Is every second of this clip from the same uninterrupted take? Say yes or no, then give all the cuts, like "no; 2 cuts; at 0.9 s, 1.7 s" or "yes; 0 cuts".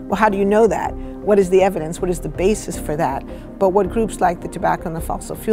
yes; 0 cuts